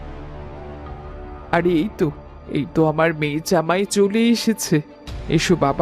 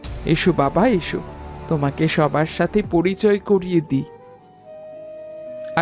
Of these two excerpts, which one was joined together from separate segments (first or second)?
first